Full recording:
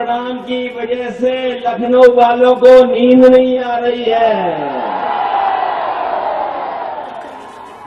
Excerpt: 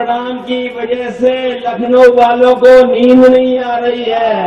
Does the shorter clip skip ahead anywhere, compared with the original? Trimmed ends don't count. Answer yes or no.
no